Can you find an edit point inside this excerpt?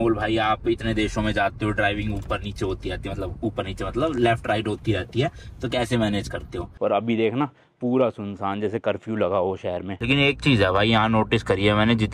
yes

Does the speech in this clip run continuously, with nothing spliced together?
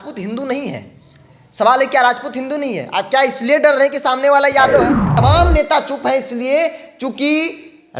no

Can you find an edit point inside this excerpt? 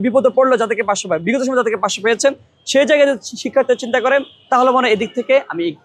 no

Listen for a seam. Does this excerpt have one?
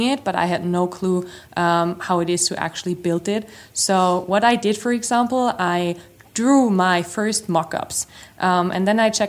no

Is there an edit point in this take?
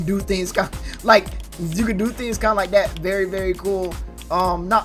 no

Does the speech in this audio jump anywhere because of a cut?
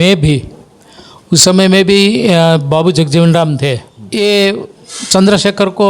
yes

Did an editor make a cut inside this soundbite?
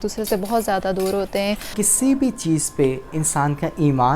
yes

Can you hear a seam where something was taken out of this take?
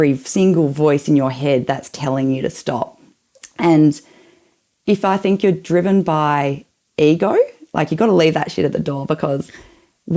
no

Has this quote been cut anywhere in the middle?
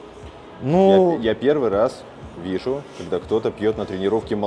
no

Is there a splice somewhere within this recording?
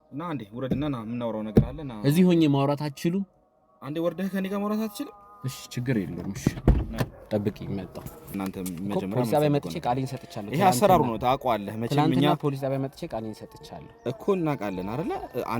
yes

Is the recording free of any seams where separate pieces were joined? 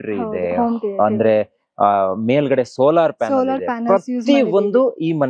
yes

